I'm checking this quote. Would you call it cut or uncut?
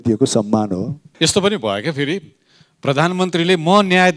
cut